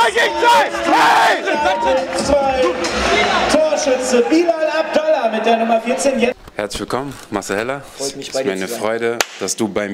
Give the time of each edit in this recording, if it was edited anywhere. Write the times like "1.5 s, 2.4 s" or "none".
6.4 s